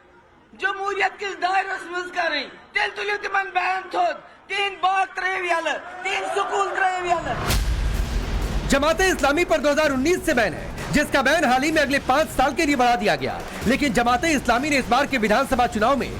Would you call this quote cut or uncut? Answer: uncut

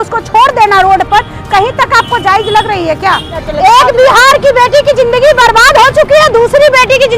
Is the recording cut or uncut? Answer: cut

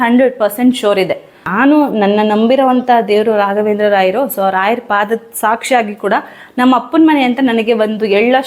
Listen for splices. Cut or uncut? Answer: cut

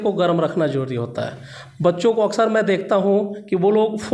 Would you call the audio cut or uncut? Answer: uncut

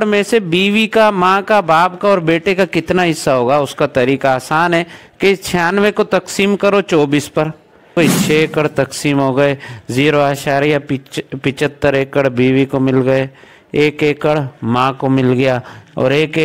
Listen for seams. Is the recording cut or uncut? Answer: cut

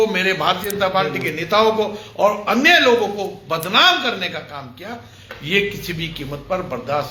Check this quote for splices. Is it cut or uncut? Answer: uncut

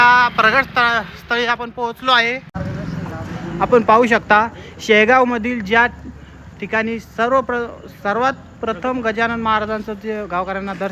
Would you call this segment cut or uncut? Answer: cut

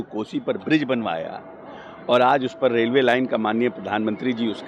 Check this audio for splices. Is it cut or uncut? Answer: uncut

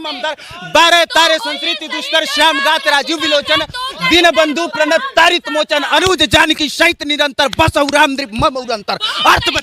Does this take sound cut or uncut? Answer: uncut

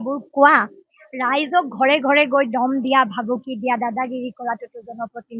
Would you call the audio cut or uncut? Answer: uncut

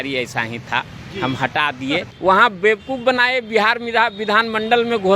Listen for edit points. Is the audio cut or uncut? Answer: cut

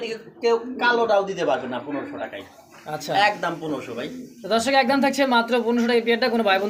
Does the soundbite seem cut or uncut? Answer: uncut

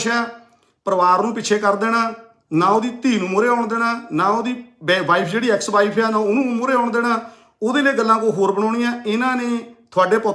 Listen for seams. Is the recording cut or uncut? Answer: uncut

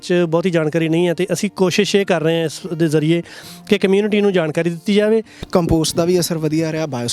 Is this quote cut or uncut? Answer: cut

